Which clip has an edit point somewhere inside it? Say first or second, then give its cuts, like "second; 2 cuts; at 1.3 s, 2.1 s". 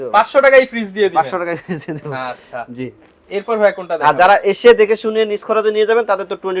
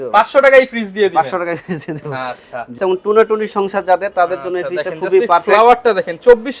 second; 1 cut; at 2.8 s